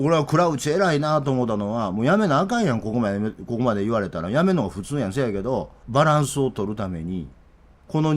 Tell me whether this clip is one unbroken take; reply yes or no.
no